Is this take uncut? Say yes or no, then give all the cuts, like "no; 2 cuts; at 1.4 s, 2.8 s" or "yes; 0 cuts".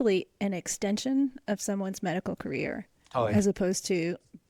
yes; 0 cuts